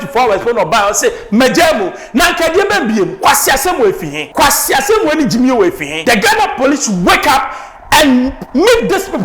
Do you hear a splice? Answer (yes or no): yes